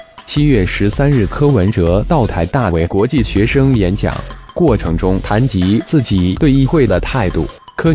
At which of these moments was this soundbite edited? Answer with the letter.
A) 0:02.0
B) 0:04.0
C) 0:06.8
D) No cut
D